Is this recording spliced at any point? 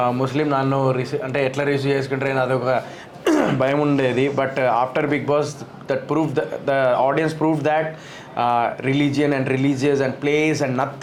no; 0 cuts

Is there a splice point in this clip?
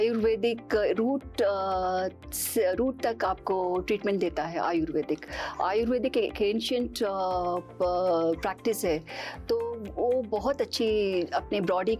no; 0 cuts

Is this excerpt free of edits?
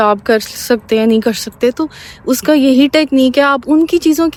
yes; 0 cuts

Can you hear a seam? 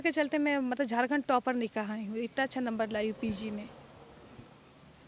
no; 0 cuts

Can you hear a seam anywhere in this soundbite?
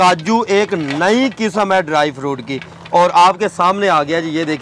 no; 0 cuts

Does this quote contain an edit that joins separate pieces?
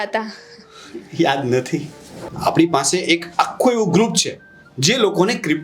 yes; 1 cut; at 2.2 s

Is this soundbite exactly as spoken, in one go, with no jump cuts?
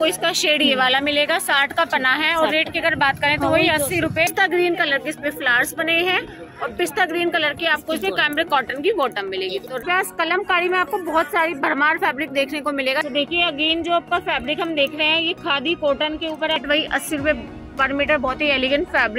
no; 4 cuts; at 4.3 s, 9.8 s, 13.0 s, 16.6 s

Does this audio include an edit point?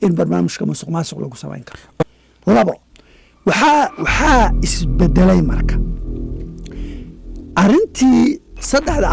yes; 1 cut; at 1.8 s

